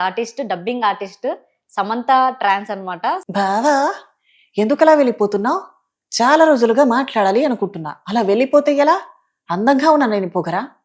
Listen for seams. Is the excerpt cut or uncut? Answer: cut